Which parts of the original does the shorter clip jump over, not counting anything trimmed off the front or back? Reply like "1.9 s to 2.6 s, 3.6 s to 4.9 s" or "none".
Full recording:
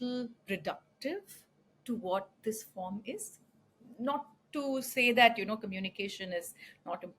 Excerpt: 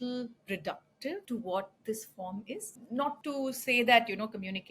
1.2 s to 1.8 s, 3.7 s to 4.4 s